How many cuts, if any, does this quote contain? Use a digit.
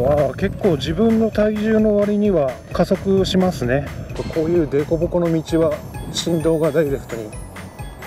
2